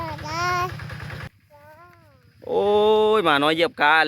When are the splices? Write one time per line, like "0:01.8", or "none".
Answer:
0:01.2